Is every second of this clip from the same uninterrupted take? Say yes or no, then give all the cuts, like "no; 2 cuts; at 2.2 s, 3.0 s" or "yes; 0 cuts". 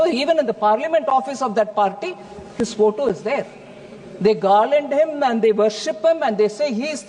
yes; 0 cuts